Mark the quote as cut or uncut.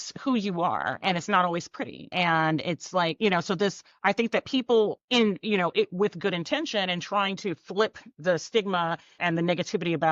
cut